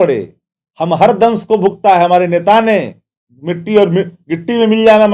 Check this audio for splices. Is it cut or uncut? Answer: uncut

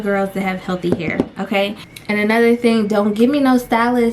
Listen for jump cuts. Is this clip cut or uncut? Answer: cut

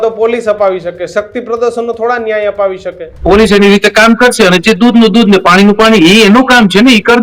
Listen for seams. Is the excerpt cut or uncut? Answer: cut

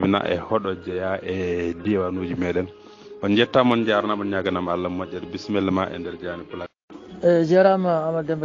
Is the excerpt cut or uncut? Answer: cut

